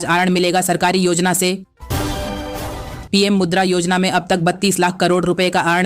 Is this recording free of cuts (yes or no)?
no